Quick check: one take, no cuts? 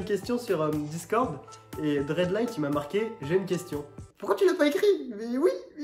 no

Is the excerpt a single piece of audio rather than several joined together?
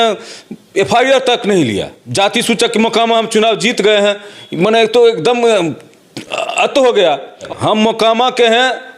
no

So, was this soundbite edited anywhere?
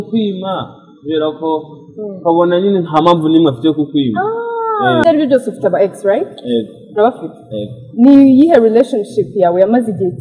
yes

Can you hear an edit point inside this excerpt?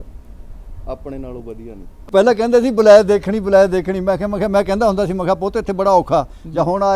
yes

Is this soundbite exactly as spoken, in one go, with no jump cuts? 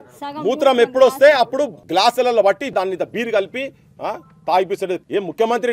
no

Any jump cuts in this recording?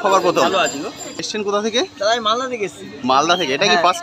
yes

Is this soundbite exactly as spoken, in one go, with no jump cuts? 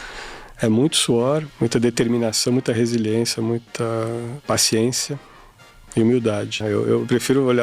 no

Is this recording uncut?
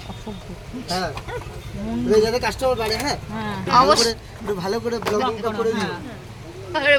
yes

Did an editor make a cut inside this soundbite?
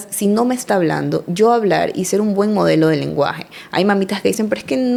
no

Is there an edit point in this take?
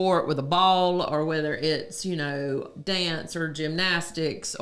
no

